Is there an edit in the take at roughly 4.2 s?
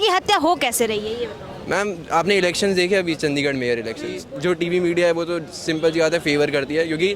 yes; 1 cut; at 4.2 s

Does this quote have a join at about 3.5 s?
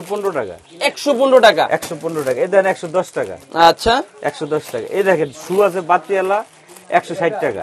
no; 0 cuts

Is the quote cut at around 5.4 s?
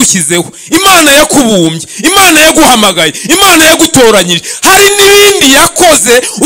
no; 0 cuts

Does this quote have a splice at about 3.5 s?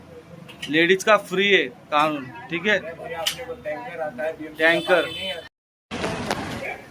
no; 1 cut; at 5.4 s

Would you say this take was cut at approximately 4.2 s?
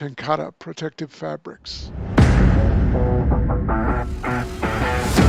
no; 1 cut; at 1.9 s

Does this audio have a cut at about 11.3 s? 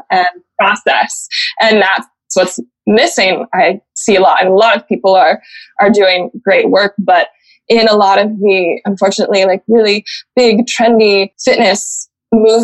yes; 1 cut; at 11.3 s

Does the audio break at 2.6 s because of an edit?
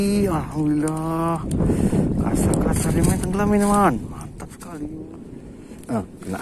no; 1 cut; at 4.9 s

